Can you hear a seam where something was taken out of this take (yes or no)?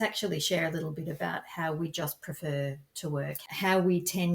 yes